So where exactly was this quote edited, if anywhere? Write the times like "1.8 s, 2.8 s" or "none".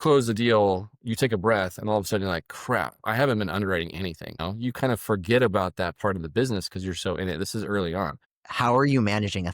4.3 s, 8.3 s